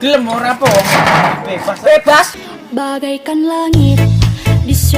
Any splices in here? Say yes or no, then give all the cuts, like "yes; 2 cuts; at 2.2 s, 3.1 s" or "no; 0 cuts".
yes; 1 cut; at 2.3 s